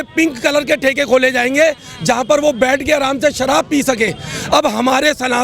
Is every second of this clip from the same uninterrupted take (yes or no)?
yes